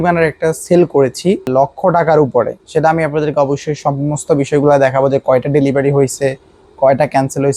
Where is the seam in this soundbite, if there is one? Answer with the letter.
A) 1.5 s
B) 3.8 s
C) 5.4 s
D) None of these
A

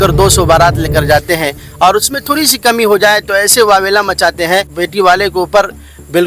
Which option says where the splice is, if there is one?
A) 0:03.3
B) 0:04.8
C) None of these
B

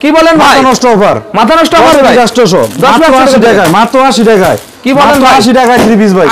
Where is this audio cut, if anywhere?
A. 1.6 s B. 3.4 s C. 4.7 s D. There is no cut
D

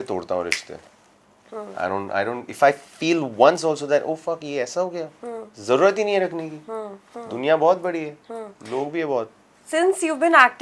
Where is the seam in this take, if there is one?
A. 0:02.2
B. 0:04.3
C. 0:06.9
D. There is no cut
D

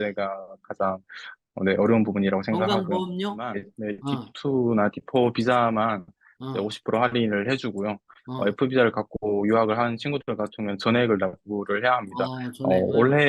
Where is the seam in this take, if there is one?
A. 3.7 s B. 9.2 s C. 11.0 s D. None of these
A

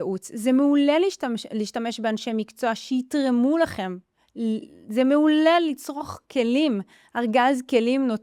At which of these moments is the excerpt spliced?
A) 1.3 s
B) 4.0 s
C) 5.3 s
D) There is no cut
D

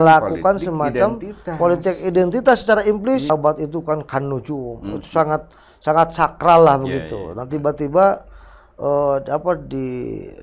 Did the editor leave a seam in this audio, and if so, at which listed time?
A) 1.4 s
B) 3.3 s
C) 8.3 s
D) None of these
B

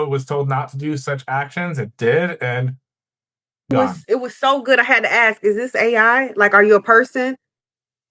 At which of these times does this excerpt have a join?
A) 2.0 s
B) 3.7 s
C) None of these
B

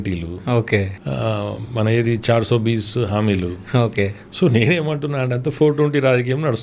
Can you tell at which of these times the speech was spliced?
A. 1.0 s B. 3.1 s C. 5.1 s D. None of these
A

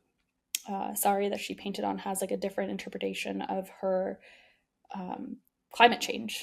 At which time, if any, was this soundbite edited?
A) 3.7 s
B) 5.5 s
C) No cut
B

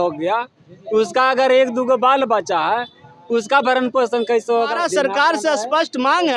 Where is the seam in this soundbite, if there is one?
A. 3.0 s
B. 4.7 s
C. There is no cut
B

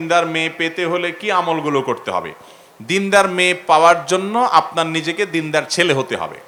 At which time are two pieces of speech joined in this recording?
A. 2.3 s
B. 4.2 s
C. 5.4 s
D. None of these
D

